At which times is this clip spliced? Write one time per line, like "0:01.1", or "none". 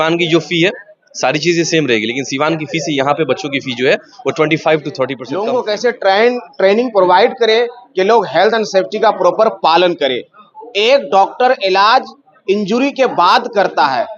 0:05.3